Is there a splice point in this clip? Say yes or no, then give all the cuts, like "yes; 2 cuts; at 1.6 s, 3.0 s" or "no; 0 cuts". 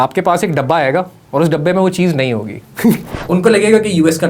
yes; 1 cut; at 3.1 s